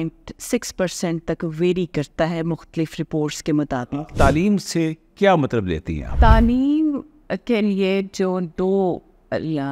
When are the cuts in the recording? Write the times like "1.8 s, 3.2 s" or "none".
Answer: 3.7 s, 6.1 s